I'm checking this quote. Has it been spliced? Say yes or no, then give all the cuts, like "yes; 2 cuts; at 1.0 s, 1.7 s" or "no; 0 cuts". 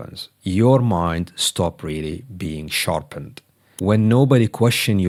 no; 0 cuts